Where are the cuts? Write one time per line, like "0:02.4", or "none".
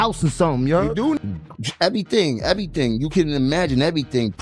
0:01.2